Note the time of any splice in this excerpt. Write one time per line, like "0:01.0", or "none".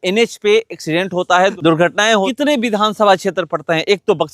0:02.3